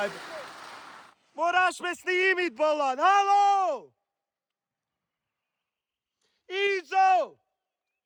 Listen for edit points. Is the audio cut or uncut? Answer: uncut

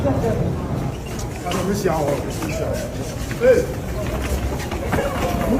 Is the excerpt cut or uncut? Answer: uncut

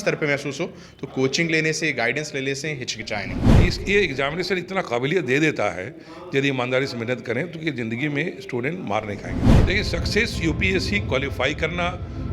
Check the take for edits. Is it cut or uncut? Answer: cut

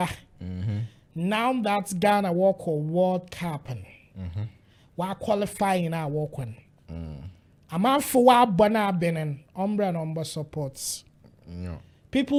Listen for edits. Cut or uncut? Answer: uncut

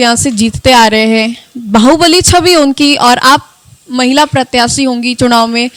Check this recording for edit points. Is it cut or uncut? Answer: uncut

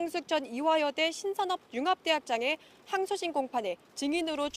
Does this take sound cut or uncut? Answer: cut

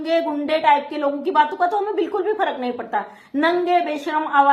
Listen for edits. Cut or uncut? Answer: uncut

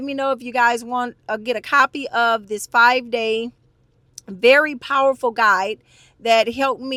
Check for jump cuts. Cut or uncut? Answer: uncut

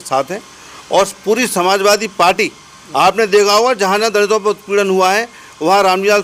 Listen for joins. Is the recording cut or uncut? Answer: uncut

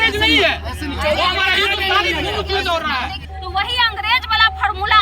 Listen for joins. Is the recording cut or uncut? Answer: cut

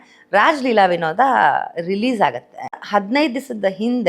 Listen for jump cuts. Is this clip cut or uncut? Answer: cut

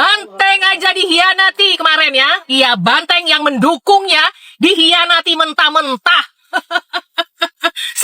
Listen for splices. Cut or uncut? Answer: uncut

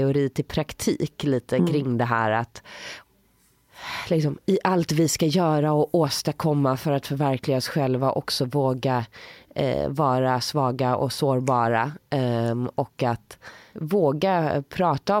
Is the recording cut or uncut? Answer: uncut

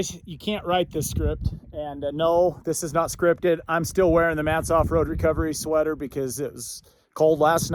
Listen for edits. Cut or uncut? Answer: uncut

